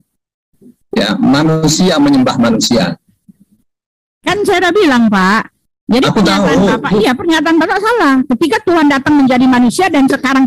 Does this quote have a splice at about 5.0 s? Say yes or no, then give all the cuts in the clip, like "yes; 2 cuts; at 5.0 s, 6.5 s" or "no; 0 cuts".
no; 0 cuts